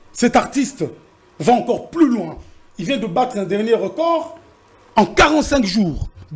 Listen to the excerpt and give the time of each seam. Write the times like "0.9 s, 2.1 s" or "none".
none